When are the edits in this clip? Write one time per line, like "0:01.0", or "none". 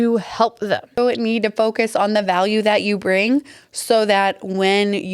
0:01.0